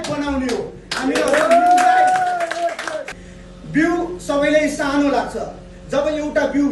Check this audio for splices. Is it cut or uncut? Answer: cut